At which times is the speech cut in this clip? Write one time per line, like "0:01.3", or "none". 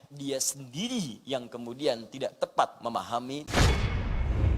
0:03.5